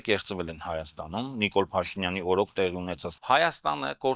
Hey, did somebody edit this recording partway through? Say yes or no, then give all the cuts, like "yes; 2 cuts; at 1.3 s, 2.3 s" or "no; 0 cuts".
yes; 1 cut; at 3.0 s